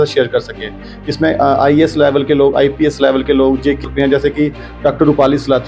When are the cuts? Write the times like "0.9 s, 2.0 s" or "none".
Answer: 3.8 s